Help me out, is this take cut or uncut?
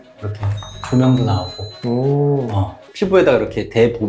cut